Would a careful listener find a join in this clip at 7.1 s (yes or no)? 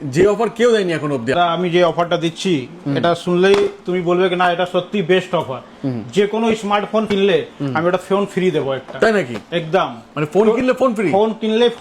yes